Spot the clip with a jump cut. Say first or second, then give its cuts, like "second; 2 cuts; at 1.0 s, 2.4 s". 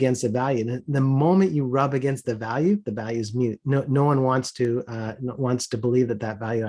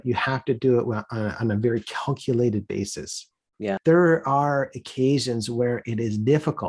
second; 1 cut; at 3.8 s